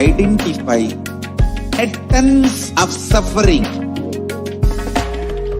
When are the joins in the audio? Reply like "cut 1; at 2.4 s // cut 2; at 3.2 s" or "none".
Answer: cut 1; at 1.8 s // cut 2; at 3.6 s